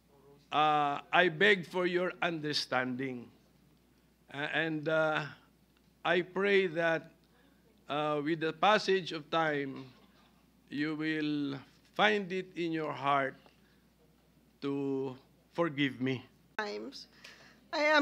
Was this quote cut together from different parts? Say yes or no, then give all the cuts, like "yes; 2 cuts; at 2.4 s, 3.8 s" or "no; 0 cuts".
yes; 1 cut; at 16.6 s